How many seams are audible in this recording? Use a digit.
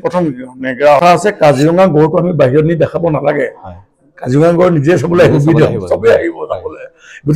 1